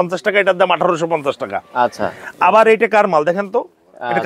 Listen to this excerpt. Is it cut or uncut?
uncut